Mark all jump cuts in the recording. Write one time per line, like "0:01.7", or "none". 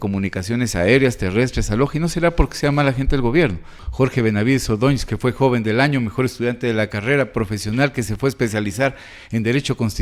0:03.8